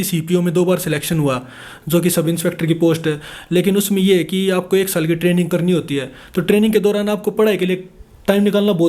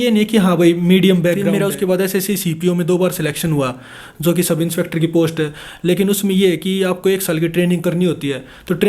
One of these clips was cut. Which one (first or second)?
second